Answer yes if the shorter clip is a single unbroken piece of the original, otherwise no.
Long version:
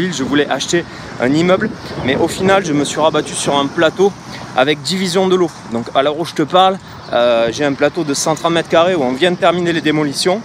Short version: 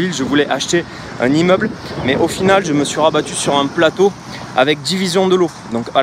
yes